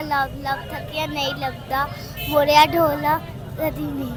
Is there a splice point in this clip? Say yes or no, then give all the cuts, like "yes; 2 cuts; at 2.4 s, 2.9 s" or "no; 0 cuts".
no; 0 cuts